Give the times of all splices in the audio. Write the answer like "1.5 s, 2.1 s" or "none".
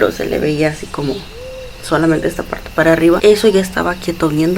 3.2 s